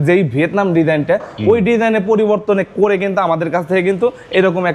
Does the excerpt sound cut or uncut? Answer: uncut